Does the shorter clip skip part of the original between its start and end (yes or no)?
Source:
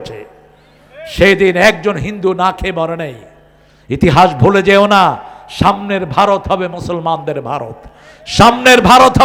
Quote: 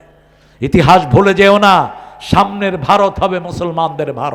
no